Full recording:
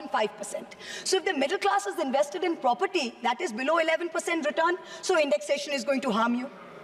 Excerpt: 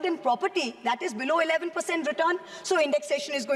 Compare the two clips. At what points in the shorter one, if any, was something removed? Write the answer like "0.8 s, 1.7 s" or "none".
none